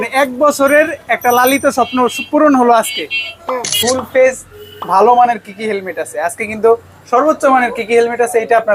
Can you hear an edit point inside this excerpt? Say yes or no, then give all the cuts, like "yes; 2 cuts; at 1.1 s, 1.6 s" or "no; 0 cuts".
yes; 1 cut; at 3.7 s